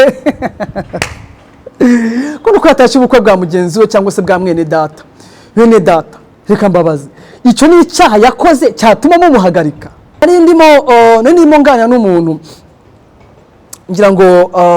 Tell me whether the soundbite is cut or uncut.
cut